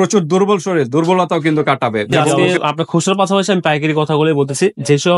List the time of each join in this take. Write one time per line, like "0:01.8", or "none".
0:02.4